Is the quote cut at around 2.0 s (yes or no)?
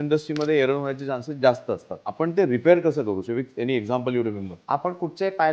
yes